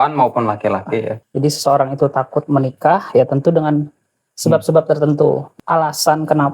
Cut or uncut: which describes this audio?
cut